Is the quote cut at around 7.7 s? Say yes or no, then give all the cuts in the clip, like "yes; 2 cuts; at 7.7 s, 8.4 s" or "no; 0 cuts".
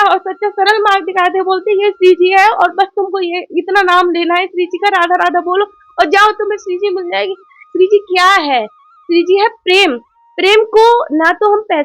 yes; 1 cut; at 7.7 s